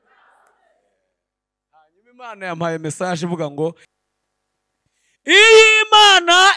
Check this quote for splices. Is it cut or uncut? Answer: cut